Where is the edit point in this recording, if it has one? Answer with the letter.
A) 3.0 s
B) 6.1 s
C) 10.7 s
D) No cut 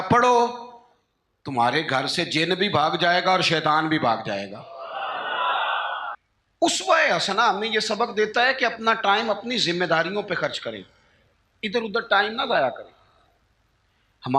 B